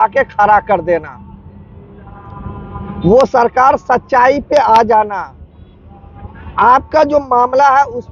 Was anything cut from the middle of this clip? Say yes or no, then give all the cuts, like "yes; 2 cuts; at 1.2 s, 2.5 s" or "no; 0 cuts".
no; 0 cuts